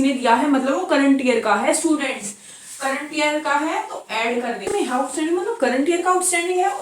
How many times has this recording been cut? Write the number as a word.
one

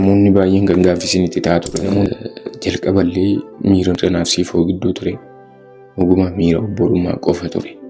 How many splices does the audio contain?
two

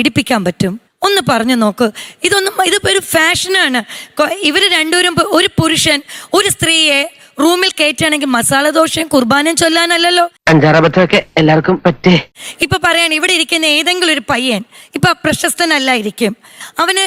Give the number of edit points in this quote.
zero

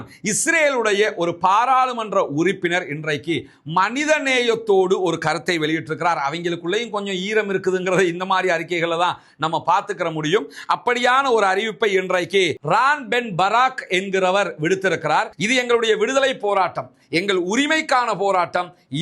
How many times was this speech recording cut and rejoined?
one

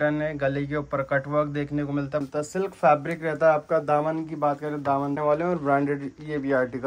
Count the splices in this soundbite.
two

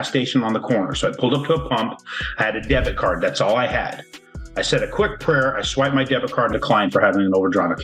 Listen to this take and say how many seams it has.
one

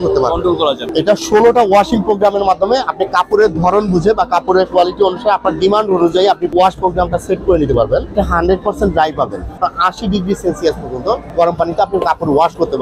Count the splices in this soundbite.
five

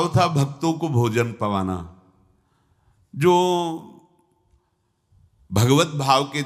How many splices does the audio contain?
zero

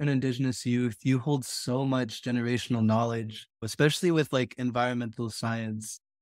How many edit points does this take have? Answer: one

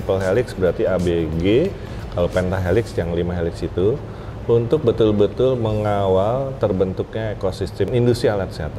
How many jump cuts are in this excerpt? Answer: one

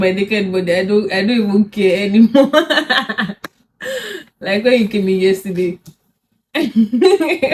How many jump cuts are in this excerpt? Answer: zero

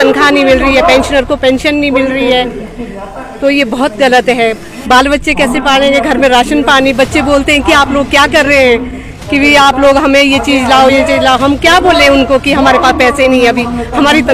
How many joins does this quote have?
zero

